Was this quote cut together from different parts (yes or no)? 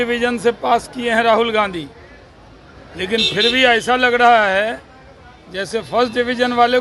no